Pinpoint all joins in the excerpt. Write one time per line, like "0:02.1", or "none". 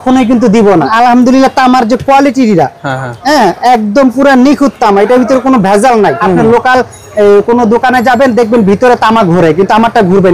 0:00.9
0:06.2